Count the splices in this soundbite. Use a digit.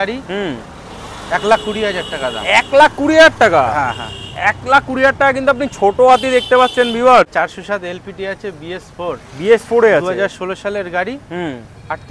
1